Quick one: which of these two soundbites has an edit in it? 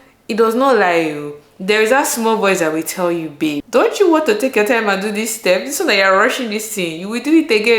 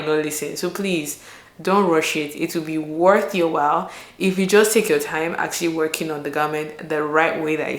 first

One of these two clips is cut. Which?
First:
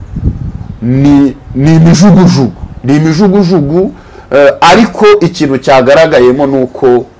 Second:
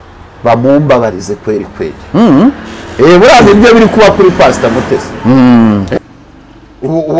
second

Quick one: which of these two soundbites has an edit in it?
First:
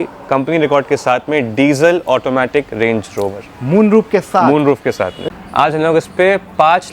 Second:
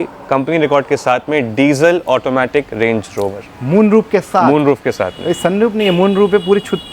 first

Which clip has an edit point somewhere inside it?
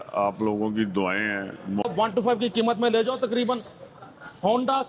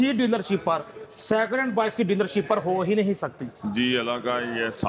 first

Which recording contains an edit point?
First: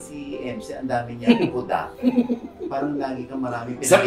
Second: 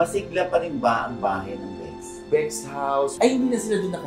second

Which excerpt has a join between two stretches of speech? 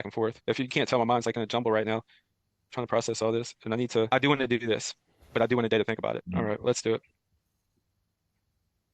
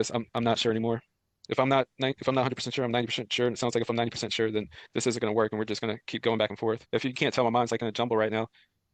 first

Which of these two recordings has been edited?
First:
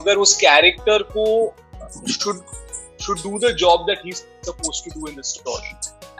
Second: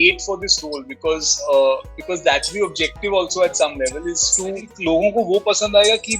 second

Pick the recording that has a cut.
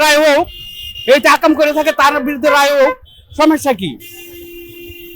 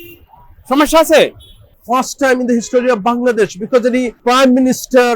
second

